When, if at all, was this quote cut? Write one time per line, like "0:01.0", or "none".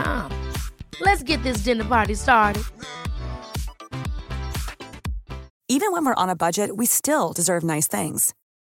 none